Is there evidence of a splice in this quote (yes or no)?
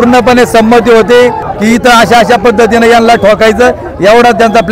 yes